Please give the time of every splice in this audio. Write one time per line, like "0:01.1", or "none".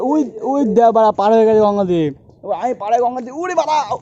0:02.1